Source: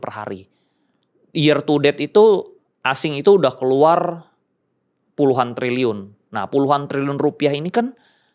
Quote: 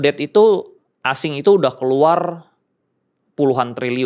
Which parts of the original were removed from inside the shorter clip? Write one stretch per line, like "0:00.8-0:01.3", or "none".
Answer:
none